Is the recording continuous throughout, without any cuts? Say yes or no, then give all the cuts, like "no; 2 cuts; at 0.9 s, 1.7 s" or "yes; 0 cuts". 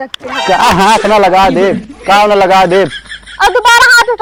yes; 0 cuts